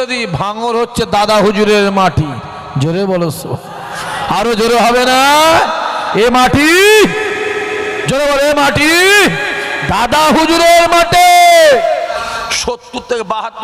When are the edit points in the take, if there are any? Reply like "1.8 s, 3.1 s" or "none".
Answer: 12.2 s